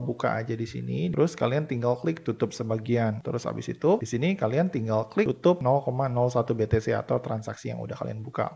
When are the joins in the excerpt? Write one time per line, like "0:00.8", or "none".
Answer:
0:01.1
0:03.2